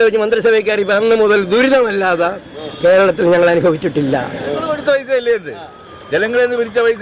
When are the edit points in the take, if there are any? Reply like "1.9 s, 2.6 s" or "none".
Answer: 4.7 s